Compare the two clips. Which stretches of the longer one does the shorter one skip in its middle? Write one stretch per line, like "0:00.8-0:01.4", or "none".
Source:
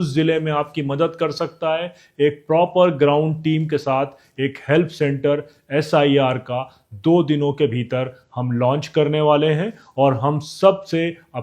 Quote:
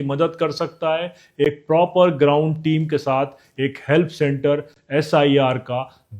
none